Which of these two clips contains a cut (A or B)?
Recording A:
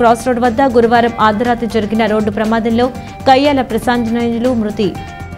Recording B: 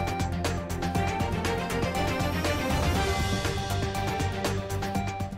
B